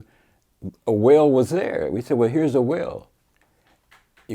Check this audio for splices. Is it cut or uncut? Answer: uncut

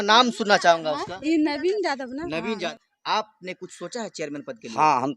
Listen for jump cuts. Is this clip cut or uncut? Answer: cut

